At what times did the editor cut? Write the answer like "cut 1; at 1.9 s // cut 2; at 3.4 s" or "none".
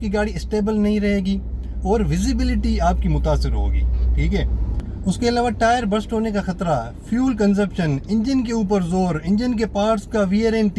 none